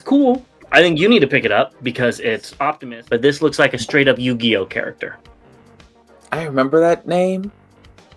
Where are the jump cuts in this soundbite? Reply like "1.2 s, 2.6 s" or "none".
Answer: 2.8 s